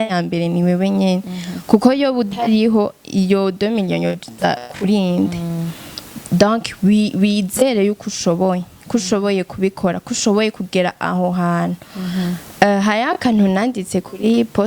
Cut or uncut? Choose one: uncut